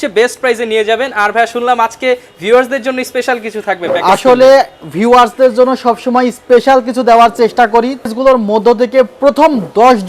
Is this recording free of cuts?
no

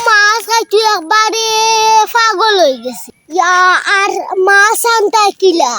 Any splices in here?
yes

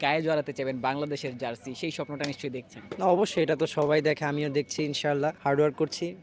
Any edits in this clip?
yes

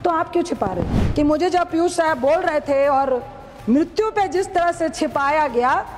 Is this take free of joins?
no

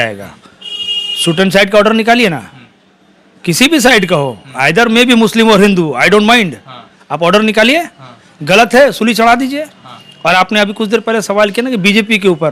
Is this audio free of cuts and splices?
yes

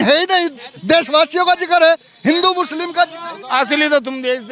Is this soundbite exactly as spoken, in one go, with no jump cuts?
yes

